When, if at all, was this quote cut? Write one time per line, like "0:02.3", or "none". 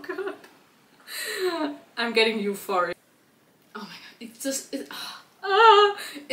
0:03.0